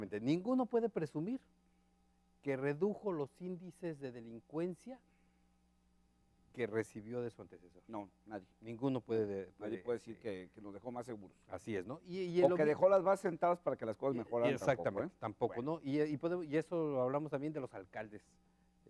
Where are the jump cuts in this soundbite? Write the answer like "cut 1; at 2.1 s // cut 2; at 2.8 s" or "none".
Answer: cut 1; at 10.7 s